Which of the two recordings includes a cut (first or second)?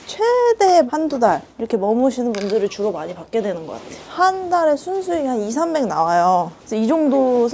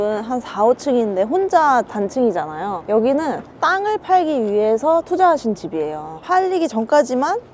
first